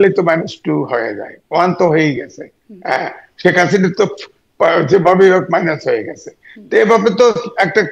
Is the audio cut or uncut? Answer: uncut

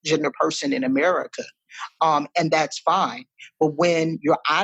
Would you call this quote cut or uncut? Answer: uncut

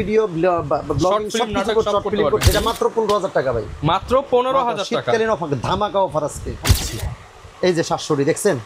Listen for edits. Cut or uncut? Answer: cut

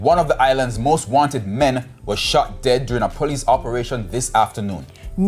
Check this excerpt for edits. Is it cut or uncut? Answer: uncut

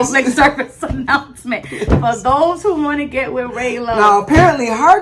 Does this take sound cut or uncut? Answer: uncut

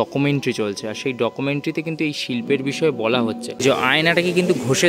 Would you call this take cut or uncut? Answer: cut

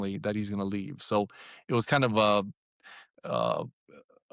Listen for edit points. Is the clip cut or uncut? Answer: uncut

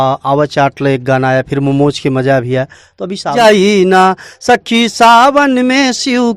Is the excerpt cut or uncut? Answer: cut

